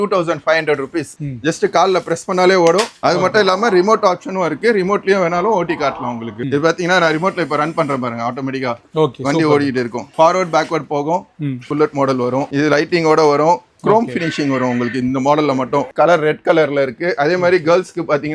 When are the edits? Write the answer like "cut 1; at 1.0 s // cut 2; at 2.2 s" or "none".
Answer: cut 1; at 1.1 s // cut 2; at 6.4 s // cut 3; at 11.7 s // cut 4; at 15.9 s

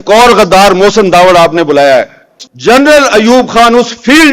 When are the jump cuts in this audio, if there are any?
cut 1; at 2.5 s

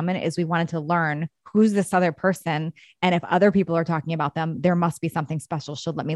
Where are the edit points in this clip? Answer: none

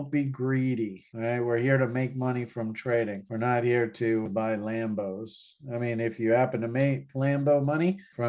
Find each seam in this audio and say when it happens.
cut 1; at 4.2 s

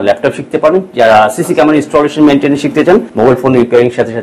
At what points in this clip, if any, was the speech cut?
cut 1; at 3.1 s

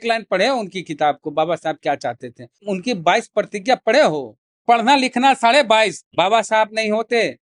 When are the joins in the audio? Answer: cut 1; at 2.6 s // cut 2; at 4.6 s // cut 3; at 6.0 s

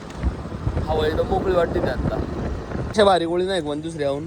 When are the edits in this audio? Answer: cut 1; at 2.9 s

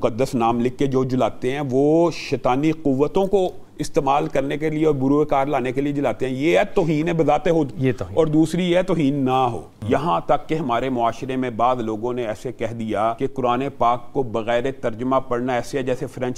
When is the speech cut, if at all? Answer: cut 1; at 9.7 s // cut 2; at 13.2 s

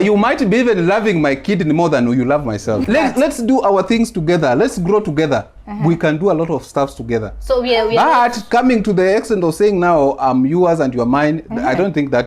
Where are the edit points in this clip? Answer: cut 1; at 2.8 s

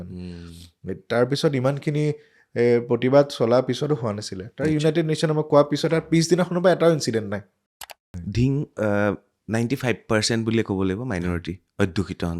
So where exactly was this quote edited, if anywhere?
cut 1; at 7.9 s

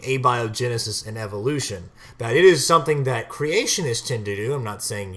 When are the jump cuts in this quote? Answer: cut 1; at 1.3 s

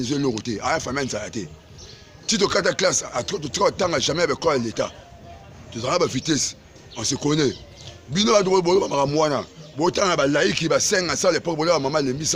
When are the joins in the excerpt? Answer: none

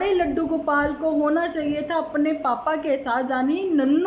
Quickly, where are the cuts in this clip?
none

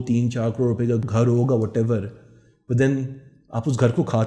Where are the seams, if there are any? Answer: cut 1; at 1.1 s

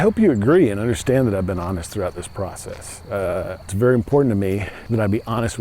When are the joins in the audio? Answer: cut 1; at 3.7 s // cut 2; at 4.7 s

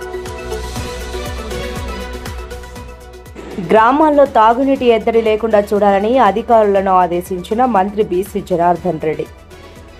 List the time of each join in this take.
cut 1; at 3.2 s

